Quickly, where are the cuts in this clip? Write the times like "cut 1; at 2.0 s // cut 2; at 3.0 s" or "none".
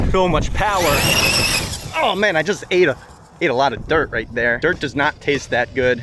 none